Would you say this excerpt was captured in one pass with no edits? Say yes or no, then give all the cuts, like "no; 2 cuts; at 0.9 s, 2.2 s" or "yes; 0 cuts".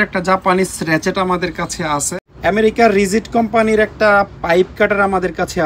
no; 1 cut; at 2.1 s